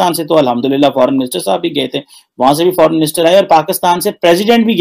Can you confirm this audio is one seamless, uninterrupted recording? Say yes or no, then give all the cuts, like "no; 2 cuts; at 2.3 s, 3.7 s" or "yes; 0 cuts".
yes; 0 cuts